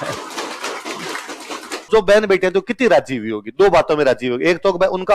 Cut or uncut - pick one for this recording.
cut